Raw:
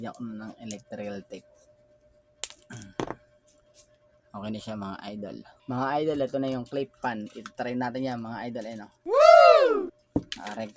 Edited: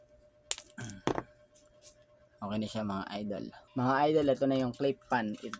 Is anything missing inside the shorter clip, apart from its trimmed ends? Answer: no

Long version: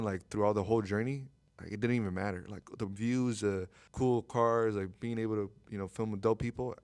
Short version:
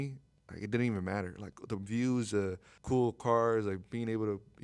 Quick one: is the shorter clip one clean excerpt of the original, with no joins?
yes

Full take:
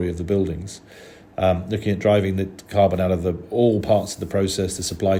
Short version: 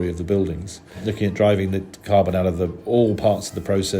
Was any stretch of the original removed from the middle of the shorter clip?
yes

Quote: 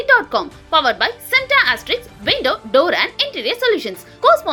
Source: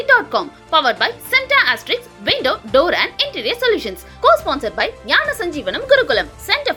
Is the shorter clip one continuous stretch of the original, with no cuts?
yes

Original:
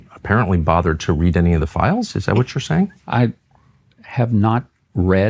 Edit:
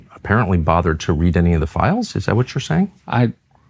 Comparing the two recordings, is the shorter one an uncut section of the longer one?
yes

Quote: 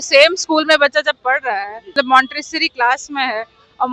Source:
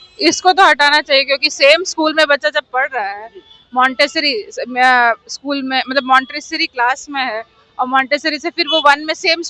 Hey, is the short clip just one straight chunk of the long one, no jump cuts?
no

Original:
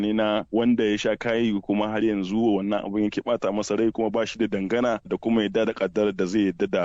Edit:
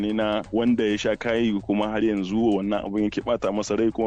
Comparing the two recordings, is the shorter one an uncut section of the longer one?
yes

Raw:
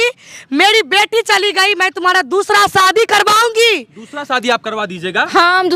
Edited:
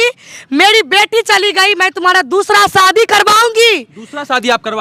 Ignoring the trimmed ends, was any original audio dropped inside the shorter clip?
no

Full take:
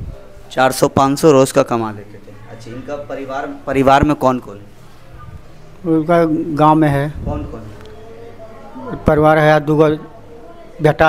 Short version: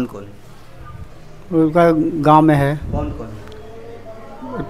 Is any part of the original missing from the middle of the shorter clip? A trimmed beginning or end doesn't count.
no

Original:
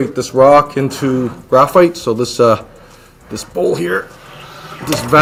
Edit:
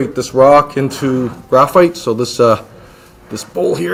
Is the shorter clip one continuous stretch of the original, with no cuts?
yes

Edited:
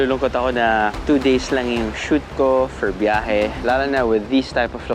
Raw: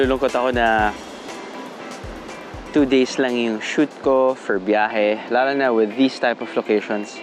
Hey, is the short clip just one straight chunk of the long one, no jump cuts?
no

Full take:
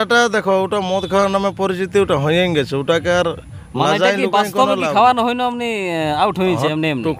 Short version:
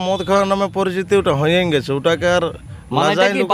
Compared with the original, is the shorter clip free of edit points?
yes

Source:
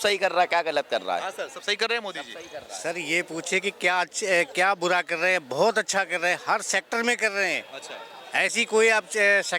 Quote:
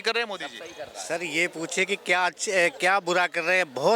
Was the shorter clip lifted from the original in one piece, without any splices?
yes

